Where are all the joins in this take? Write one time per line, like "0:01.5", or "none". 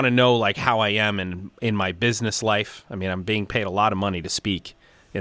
none